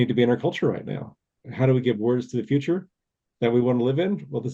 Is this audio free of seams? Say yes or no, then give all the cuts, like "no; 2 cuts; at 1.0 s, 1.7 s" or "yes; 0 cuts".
no; 1 cut; at 1.4 s